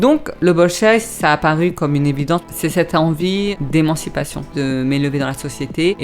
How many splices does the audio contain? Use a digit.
3